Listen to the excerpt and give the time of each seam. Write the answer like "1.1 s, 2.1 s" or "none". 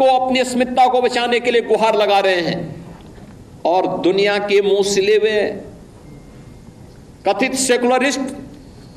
none